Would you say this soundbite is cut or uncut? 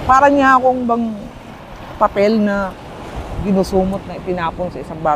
uncut